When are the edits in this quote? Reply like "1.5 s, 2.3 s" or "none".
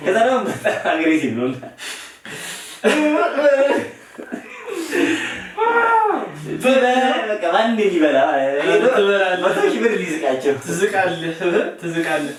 none